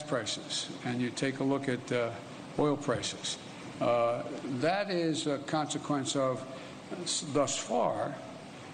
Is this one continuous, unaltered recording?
yes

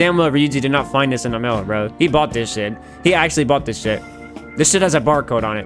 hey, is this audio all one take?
yes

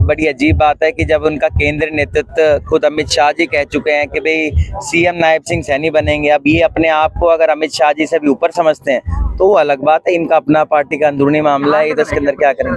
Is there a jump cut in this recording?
no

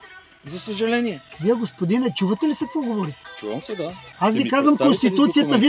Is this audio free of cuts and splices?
no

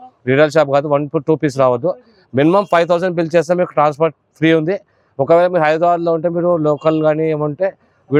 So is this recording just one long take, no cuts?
yes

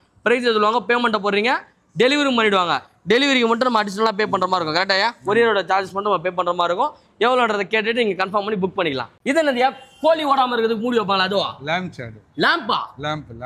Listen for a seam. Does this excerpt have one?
no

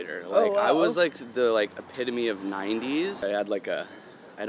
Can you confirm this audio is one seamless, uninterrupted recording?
no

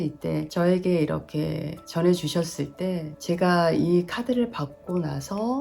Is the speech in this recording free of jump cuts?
no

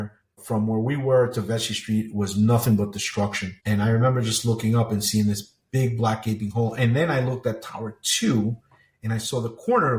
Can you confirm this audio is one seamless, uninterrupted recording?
yes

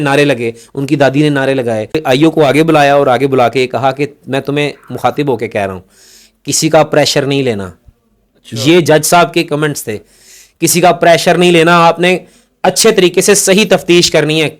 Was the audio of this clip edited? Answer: yes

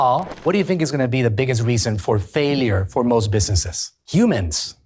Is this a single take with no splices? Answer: yes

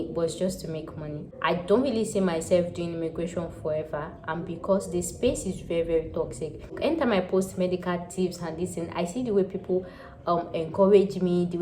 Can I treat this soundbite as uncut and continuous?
no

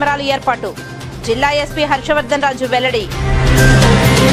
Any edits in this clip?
no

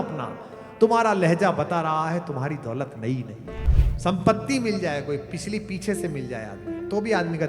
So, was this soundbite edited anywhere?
yes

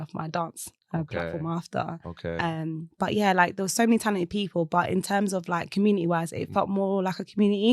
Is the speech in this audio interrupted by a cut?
no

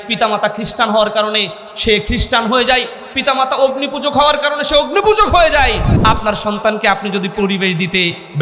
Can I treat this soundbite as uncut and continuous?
no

